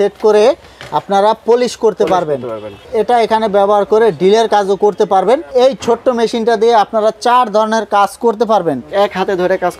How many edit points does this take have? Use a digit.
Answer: 3